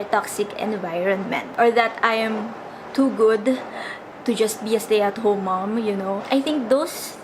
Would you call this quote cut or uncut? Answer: cut